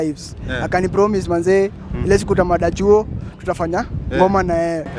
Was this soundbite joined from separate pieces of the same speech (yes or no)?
no